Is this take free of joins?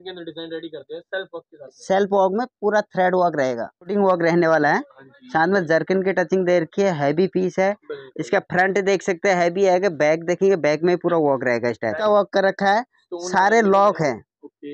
no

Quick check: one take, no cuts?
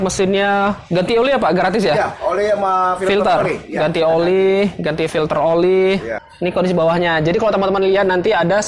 no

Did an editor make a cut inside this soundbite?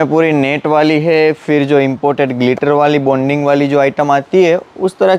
no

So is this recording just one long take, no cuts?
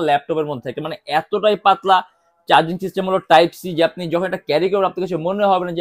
yes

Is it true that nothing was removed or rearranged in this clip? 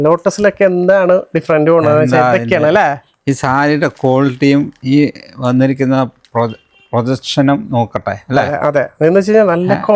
yes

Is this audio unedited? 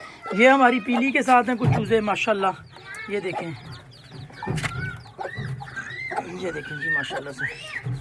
yes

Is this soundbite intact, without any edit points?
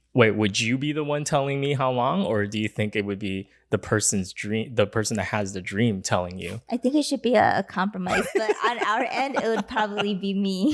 yes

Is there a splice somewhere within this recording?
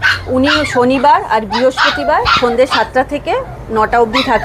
no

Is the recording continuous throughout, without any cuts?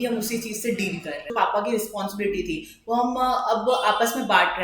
no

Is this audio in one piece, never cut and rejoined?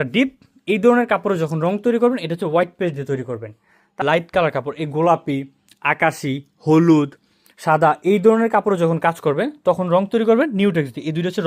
no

